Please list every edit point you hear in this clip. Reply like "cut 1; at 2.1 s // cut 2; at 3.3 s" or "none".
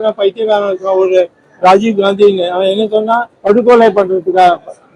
cut 1; at 3.3 s

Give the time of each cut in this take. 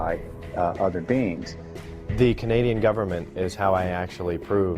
cut 1; at 3.5 s

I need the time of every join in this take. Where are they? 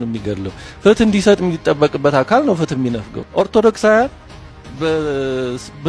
none

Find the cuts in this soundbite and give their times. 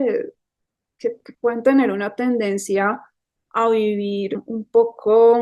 cut 1; at 4.4 s

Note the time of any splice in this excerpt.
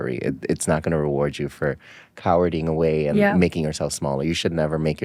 none

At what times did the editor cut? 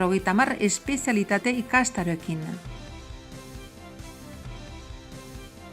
cut 1; at 2.6 s // cut 2; at 4.8 s

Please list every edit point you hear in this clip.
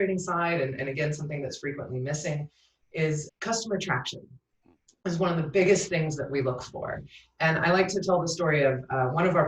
cut 1; at 3.3 s

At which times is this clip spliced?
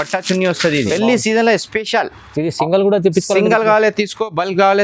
cut 1; at 0.9 s

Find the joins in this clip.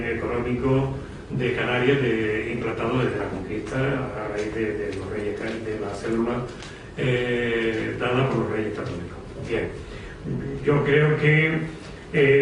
none

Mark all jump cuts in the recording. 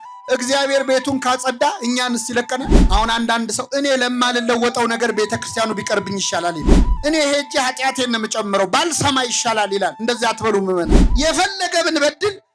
cut 1; at 2.8 s // cut 2; at 6.8 s

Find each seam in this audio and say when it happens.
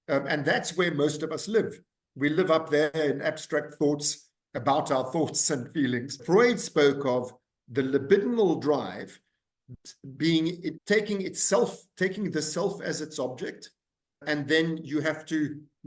cut 1; at 6.2 s // cut 2; at 10.7 s // cut 3; at 14.2 s

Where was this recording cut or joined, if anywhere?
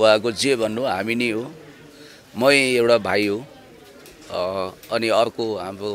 none

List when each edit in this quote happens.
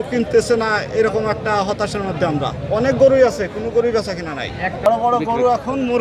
cut 1; at 4.9 s

